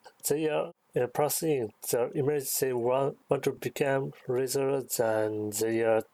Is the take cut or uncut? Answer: uncut